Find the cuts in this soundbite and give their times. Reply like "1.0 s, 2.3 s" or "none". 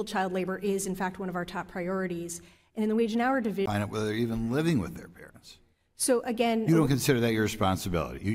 none